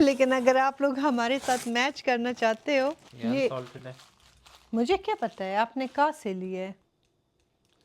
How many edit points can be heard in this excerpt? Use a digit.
1